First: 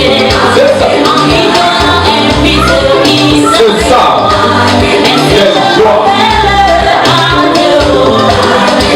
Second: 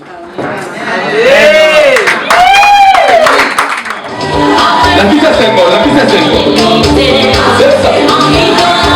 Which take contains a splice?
second; 1 cut; at 4.1 s

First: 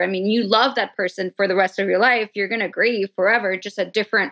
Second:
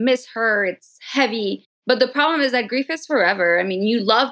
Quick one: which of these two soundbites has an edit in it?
second; 1 cut; at 1.7 s

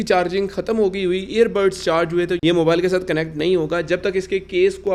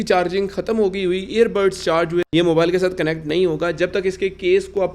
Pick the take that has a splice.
second; 1 cut; at 2.3 s

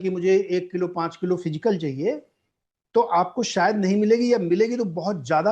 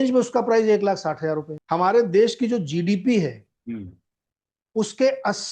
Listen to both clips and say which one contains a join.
second; 1 cut; at 1.5 s

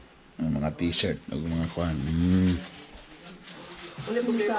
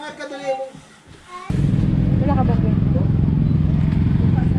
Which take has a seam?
second; 1 cut; at 1.5 s

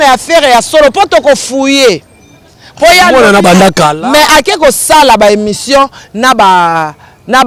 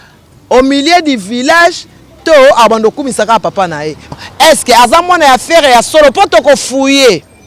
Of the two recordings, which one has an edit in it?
second; 1 cut; at 4.1 s

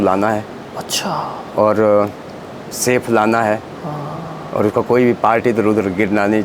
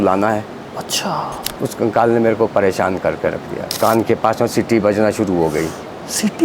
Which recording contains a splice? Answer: second; 2 cuts; at 1.4 s, 3.7 s

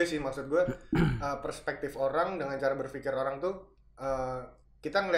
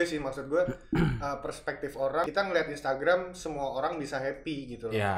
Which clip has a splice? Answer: second; 1 cut; at 2.2 s

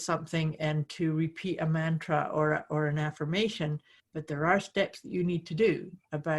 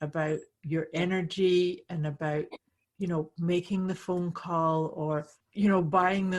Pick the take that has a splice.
second; 1 cut; at 5.4 s

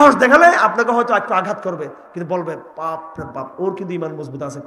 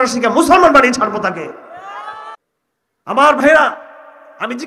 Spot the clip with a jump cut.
second; 1 cut; at 2.4 s

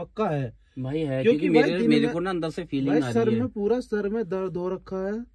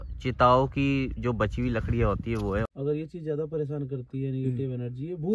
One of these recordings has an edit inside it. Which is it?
second; 1 cut; at 2.6 s

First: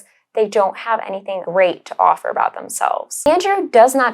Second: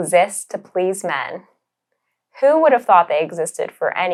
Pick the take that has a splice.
first; 2 cuts; at 1.4 s, 3.1 s

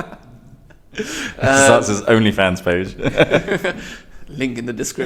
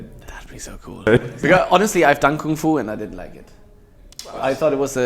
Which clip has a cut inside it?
second; 1 cut; at 1.1 s

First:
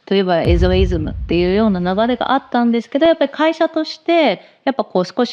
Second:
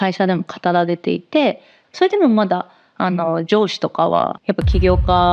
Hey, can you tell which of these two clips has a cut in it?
second; 2 cuts; at 1.7 s, 4.4 s

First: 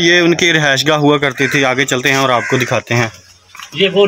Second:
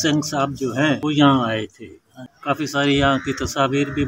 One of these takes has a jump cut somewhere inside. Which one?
second; 2 cuts; at 1.0 s, 2.3 s

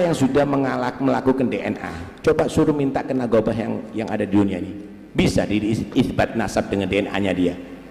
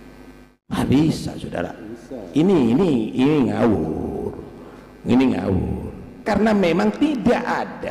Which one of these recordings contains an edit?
second; 1 cut; at 6.2 s

